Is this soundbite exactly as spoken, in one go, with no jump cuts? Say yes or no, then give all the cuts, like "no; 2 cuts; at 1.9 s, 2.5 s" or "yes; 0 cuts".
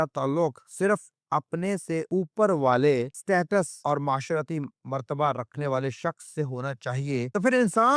yes; 0 cuts